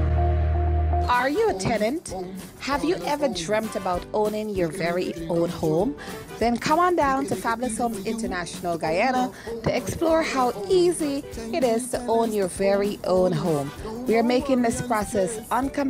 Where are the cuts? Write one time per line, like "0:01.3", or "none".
0:01.0